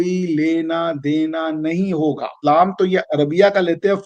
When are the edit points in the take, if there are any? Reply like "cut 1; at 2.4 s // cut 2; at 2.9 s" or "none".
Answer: cut 1; at 2.4 s